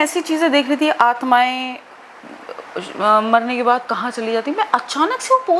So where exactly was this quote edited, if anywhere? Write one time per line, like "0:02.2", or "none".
none